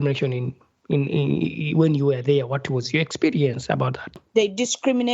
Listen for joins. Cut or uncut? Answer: cut